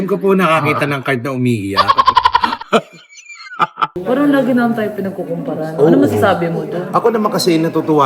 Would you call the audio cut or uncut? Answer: cut